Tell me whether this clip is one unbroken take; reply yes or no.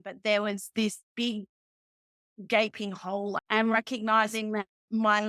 no